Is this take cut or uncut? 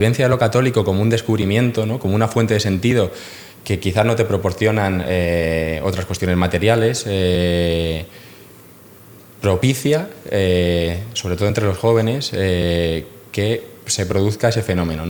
uncut